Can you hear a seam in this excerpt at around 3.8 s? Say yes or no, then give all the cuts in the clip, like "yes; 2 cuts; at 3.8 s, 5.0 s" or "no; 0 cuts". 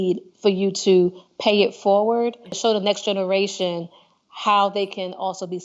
no; 1 cut; at 2.6 s